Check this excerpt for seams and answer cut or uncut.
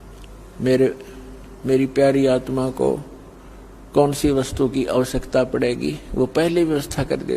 uncut